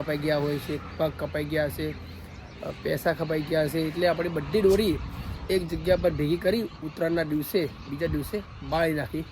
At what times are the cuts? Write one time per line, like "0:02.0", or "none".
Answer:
none